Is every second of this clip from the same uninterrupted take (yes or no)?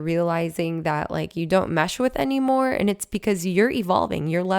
yes